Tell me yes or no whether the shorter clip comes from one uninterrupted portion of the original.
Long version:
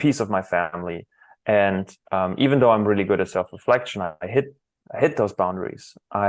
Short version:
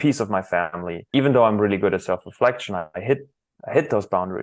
no